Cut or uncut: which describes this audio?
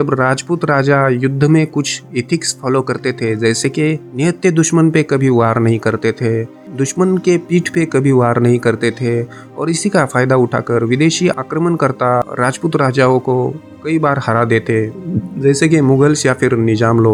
uncut